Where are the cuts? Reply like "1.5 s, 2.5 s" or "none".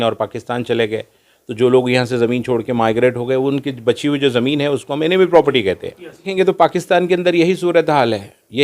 6.3 s